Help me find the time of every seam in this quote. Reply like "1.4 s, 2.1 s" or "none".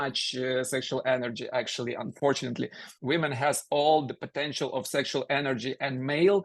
2.9 s